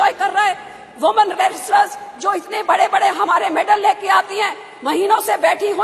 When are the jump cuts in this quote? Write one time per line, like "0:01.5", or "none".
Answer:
none